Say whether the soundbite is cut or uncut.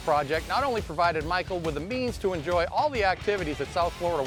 uncut